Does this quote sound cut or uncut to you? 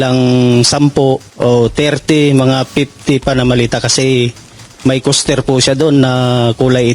cut